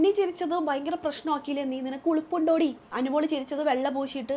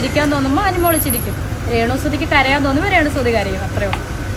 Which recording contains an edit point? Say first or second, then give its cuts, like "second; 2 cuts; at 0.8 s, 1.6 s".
first; 1 cut; at 2.9 s